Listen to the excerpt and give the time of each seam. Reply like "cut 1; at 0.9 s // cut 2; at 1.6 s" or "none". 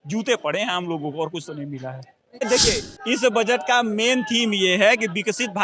cut 1; at 2.4 s

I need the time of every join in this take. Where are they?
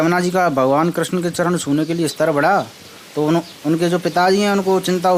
none

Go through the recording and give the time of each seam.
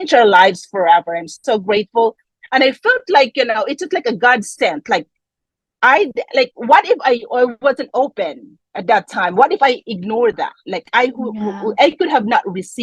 none

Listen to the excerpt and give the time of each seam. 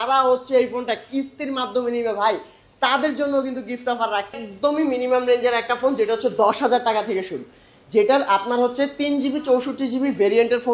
cut 1; at 4.4 s

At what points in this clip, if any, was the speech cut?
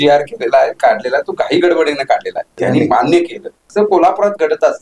cut 1; at 2.5 s // cut 2; at 3.7 s

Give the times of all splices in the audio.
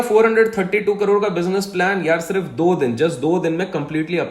none

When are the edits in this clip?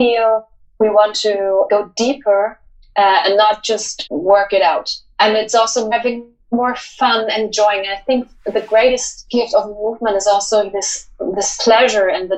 cut 1; at 1.7 s // cut 2; at 3.9 s // cut 3; at 5.0 s // cut 4; at 5.9 s // cut 5; at 9.2 s

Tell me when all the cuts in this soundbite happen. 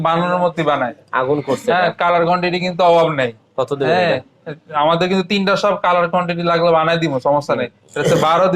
none

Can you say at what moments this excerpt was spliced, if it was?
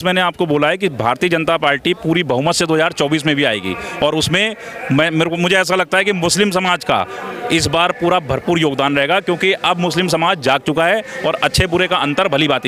none

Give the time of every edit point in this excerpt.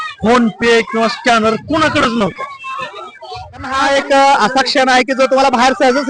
cut 1; at 3.8 s

